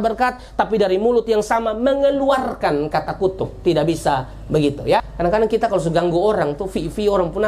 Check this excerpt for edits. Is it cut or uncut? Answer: cut